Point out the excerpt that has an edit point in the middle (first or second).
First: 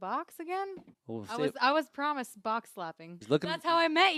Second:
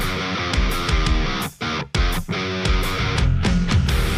first